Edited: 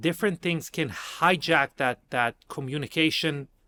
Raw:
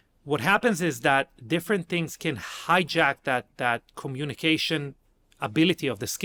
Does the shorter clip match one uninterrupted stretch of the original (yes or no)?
yes